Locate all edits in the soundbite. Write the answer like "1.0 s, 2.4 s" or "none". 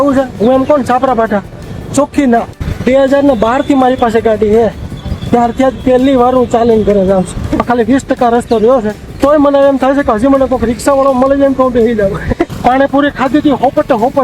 2.6 s, 7.6 s, 9.2 s, 12.5 s